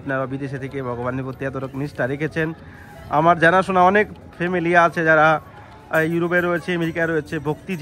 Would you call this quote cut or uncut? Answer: uncut